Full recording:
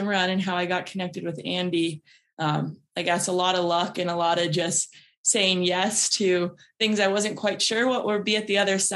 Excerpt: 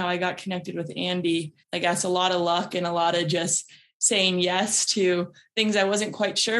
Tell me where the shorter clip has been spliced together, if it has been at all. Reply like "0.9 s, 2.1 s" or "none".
1.6 s